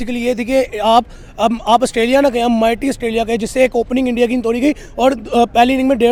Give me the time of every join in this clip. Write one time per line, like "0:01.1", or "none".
none